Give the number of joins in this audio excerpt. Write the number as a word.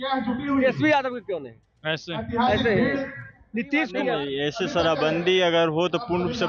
one